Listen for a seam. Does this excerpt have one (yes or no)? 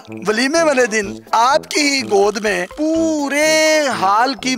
no